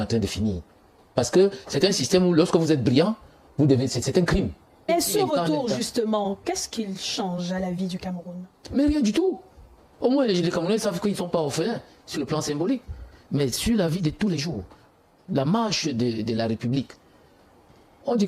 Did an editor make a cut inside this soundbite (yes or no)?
yes